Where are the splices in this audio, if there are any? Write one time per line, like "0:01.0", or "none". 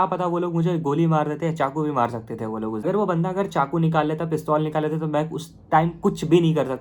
0:02.8